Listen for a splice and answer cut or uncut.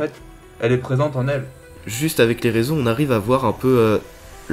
cut